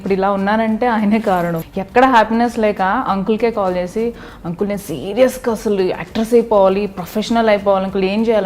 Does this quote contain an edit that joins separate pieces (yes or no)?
yes